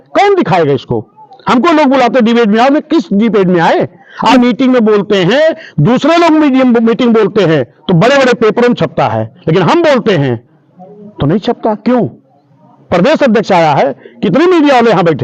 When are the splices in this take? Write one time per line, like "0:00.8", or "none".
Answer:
0:04.3